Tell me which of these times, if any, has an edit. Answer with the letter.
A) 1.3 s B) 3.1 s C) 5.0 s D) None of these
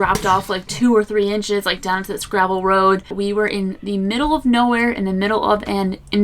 B